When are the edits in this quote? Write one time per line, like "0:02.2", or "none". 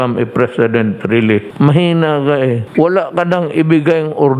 0:01.5
0:02.6